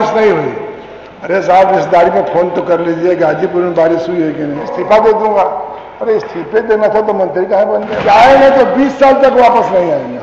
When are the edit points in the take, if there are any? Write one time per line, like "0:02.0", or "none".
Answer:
0:04.8
0:08.0